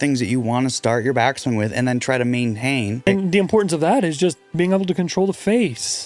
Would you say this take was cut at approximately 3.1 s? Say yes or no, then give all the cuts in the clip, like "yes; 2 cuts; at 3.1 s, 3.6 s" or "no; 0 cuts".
yes; 1 cut; at 3.1 s